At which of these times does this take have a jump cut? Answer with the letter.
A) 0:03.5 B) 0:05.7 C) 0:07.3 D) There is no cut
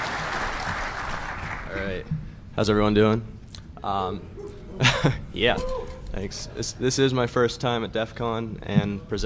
D